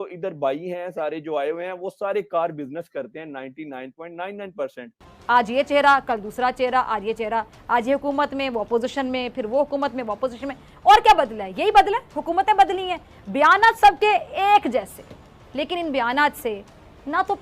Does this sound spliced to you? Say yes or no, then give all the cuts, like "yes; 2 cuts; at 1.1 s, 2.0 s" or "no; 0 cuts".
yes; 1 cut; at 5.1 s